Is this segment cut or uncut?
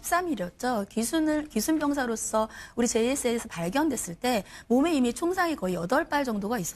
cut